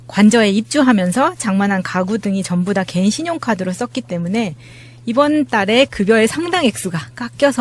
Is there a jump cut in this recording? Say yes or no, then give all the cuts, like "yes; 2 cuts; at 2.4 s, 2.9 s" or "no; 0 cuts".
no; 0 cuts